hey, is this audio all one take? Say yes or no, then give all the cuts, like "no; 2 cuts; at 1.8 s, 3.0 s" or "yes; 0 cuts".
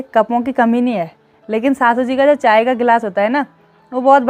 yes; 0 cuts